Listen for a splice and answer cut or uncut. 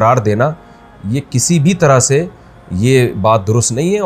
uncut